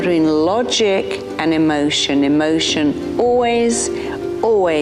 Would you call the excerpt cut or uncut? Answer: uncut